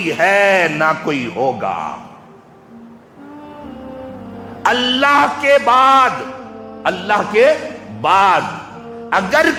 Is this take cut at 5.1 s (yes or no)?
no